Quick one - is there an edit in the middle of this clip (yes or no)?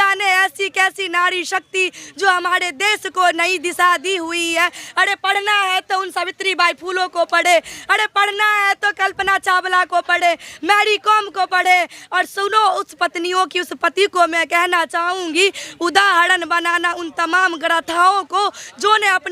no